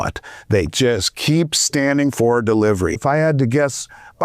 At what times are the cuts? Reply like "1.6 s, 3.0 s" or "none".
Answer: 3.0 s